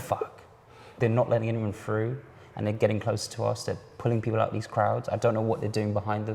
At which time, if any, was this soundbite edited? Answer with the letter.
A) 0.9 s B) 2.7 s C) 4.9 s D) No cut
A